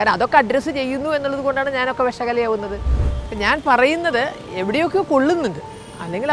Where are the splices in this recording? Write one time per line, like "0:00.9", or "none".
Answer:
0:02.9